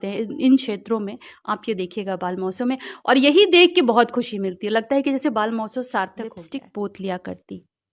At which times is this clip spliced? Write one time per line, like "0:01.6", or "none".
0:06.4